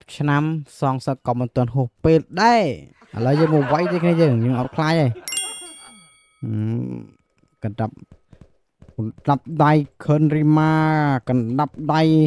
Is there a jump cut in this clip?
yes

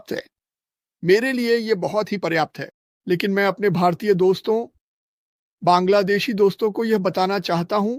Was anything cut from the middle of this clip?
no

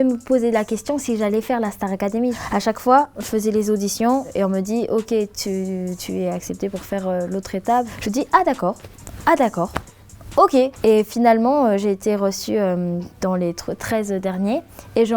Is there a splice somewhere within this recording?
no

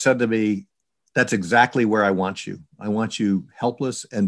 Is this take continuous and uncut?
yes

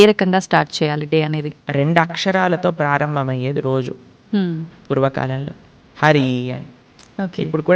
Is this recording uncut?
no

